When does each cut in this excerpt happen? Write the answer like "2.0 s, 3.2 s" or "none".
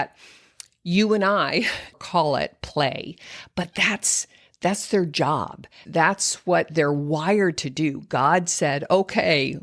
2.0 s, 5.7 s